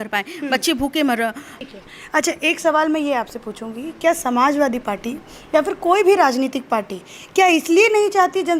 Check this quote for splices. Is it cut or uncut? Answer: uncut